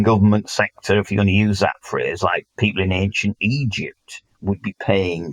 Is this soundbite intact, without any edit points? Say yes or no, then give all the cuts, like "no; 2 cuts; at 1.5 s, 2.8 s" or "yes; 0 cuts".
yes; 0 cuts